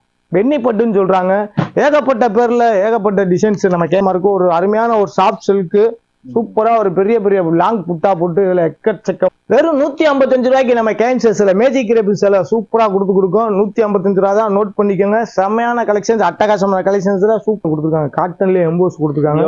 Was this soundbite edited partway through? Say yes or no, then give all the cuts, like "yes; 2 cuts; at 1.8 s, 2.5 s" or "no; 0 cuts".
yes; 3 cuts; at 4.0 s, 9.3 s, 17.6 s